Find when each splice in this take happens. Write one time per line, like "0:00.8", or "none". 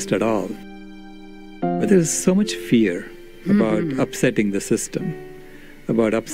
0:01.8